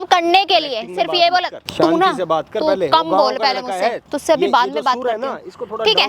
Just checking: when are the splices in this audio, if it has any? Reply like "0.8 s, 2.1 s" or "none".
1.6 s, 4.0 s